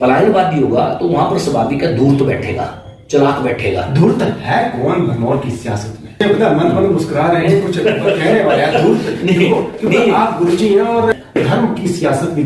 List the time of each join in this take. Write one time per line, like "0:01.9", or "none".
0:06.2
0:11.2